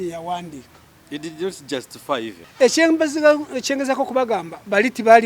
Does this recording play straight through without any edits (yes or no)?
no